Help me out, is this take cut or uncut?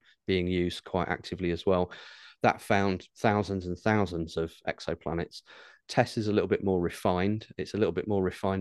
uncut